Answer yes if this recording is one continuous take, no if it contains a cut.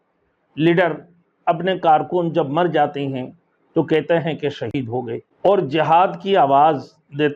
no